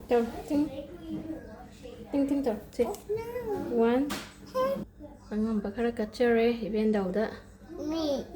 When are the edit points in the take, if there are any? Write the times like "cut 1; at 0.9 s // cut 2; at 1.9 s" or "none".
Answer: cut 1; at 4.8 s